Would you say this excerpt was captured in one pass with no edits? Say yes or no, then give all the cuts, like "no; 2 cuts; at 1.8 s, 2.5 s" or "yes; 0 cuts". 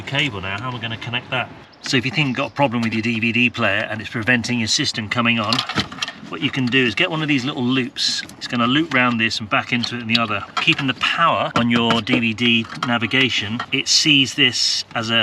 no; 5 cuts; at 1.8 s, 8.3 s, 10.5 s, 11.5 s, 13.7 s